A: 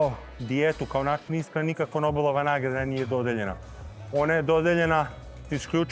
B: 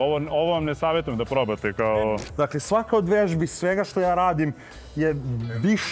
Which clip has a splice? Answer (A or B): B